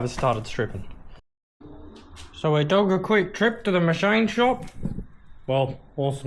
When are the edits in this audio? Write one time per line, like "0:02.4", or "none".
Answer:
0:01.2